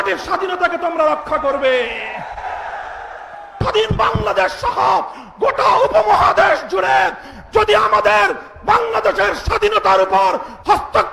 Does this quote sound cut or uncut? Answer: cut